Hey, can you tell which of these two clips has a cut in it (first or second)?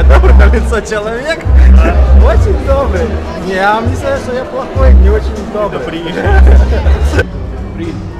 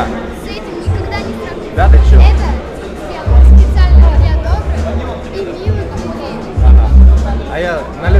first